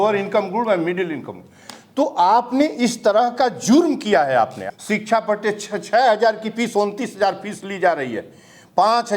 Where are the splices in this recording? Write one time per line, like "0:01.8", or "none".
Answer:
0:04.6